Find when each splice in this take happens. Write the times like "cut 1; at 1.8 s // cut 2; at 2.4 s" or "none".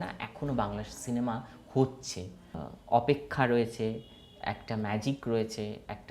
cut 1; at 2.6 s